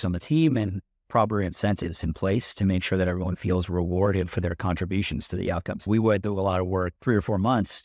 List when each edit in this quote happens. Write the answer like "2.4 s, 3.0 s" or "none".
5.9 s, 6.9 s